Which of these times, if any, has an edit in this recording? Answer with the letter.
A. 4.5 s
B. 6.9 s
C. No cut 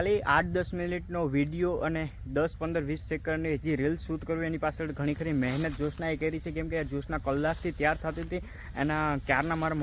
C